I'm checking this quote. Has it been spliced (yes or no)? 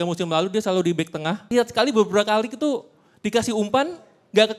yes